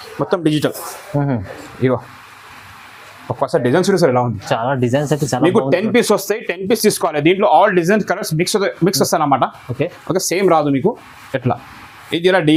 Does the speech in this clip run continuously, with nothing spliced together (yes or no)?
yes